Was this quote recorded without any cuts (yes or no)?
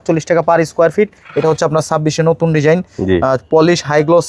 no